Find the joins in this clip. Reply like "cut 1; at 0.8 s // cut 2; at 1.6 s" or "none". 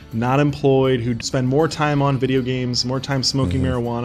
cut 1; at 1.2 s

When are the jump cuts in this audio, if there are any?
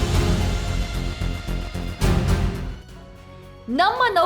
cut 1; at 3.1 s

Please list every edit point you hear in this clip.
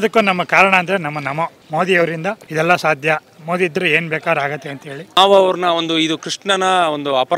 cut 1; at 1.6 s // cut 2; at 2.4 s // cut 3; at 5.2 s

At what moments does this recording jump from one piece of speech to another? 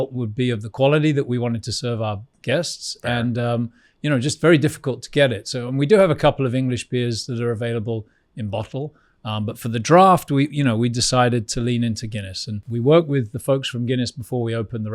cut 1; at 12.6 s

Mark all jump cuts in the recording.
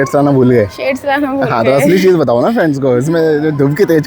none

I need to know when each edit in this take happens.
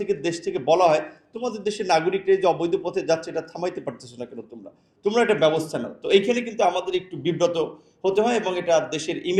none

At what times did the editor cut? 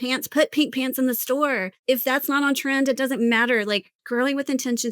cut 1; at 1.7 s // cut 2; at 3.9 s

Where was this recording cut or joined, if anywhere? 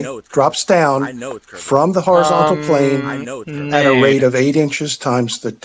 none

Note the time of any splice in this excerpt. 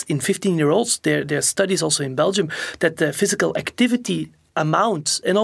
none

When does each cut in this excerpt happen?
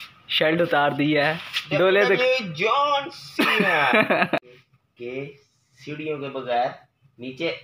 cut 1; at 4.4 s

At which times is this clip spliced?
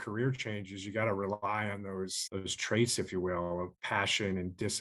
cut 1; at 2.2 s // cut 2; at 3.7 s

